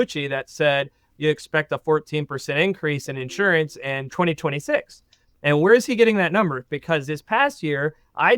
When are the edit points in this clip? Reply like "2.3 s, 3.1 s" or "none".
4.1 s